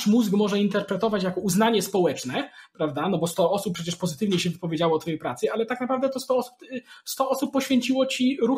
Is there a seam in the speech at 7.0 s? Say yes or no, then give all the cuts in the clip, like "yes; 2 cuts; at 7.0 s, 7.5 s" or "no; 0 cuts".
no; 0 cuts